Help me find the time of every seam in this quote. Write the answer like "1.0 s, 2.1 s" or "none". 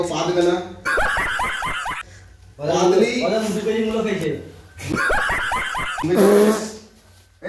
none